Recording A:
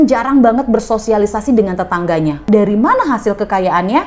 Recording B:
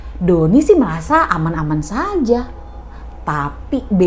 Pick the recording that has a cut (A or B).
A